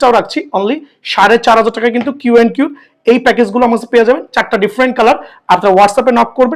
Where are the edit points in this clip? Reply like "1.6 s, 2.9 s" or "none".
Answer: none